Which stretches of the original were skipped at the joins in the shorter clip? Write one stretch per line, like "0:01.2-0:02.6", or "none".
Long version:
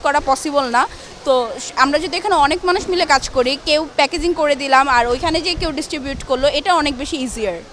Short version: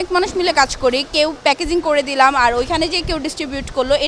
none